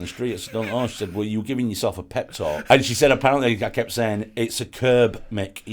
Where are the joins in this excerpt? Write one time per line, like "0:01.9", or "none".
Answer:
0:02.6